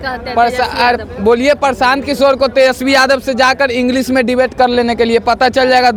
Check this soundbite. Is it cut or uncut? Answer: uncut